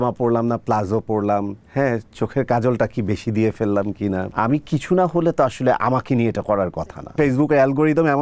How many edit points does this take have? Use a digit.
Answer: 3